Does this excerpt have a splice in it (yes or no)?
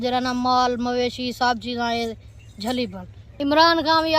yes